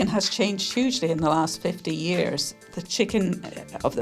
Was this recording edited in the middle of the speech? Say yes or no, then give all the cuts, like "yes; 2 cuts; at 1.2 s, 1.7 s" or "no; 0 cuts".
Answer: yes; 1 cut; at 2.5 s